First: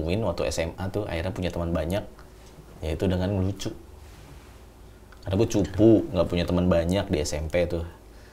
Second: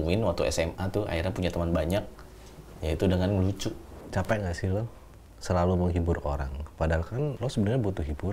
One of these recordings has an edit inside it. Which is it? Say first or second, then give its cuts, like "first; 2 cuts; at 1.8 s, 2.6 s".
second; 2 cuts; at 3.9 s, 7.4 s